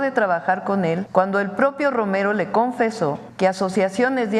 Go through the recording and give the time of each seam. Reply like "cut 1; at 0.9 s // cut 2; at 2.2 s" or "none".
cut 1; at 1.0 s // cut 2; at 3.2 s